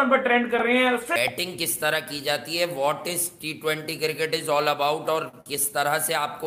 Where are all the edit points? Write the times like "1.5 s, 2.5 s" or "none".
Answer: 1.1 s

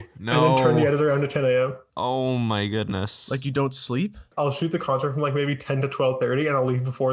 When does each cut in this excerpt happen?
4.3 s

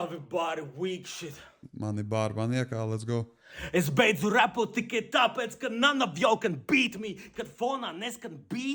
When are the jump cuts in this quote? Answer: none

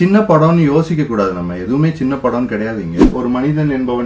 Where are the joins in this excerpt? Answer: 3.1 s

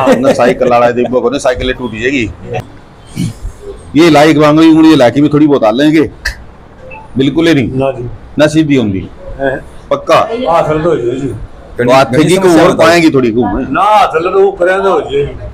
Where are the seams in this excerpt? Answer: 2.6 s

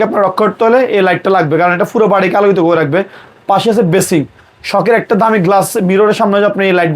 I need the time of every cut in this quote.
none

